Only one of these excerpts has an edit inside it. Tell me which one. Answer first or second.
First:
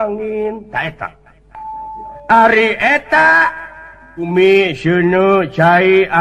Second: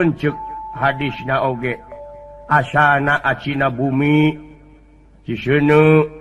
first